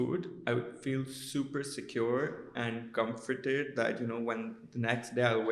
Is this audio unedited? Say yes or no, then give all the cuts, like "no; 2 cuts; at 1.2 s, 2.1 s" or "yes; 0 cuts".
yes; 0 cuts